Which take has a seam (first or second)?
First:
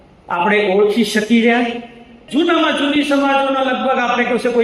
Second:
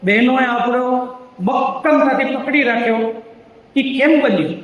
first